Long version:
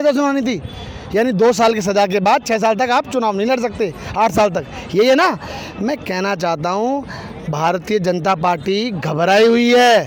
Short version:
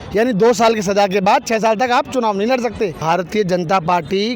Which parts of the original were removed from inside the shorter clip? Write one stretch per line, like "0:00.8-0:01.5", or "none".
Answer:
0:04.0-0:07.5